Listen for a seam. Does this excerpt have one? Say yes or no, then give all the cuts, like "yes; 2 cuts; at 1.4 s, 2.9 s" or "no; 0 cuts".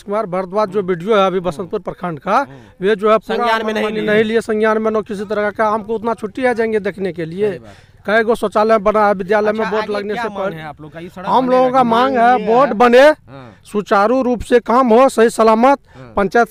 no; 0 cuts